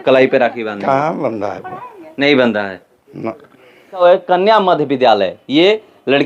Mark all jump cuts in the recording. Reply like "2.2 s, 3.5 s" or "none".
4.0 s